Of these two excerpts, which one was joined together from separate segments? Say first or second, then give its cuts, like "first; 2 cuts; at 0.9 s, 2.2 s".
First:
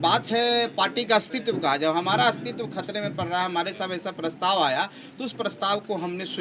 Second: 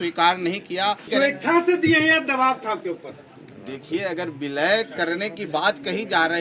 second; 1 cut; at 1.0 s